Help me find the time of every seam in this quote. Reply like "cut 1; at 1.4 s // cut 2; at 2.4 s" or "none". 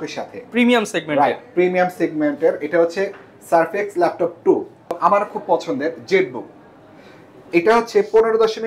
cut 1; at 4.9 s